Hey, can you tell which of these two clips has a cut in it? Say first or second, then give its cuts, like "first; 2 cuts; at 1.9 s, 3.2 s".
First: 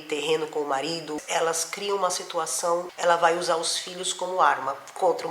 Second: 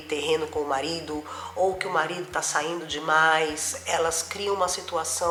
first; 2 cuts; at 1.2 s, 2.9 s